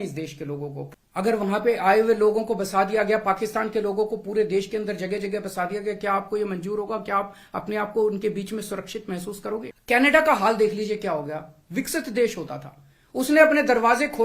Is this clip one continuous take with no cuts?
no; 2 cuts; at 0.8 s, 9.7 s

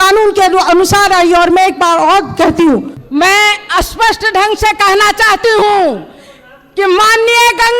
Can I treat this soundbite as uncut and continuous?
no; 1 cut; at 3.0 s

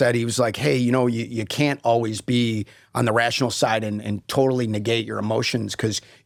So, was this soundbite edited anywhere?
no; 0 cuts

